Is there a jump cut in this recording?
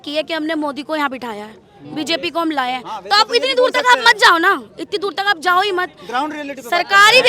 no; 0 cuts

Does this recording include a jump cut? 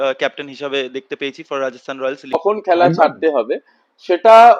yes; 1 cut; at 2.3 s

